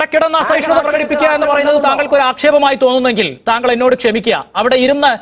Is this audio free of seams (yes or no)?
yes